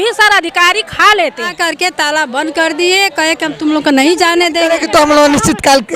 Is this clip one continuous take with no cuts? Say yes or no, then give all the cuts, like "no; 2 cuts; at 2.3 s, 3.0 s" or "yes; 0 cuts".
no; 2 cuts; at 1.5 s, 4.6 s